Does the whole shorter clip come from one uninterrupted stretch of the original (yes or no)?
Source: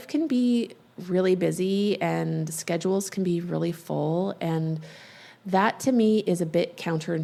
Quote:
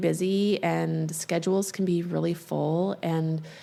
yes